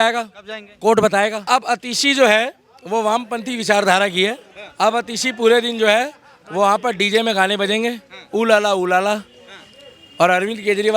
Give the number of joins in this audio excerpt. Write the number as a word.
one